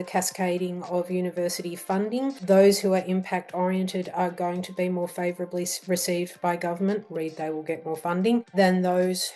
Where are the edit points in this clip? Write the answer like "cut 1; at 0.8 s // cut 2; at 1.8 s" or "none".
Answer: cut 1; at 2.4 s // cut 2; at 8.5 s